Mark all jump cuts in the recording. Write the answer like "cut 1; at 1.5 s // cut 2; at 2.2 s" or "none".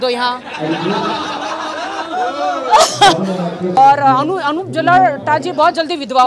cut 1; at 3.8 s